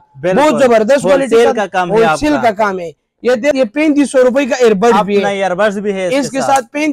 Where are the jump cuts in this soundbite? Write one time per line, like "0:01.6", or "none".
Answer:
0:03.5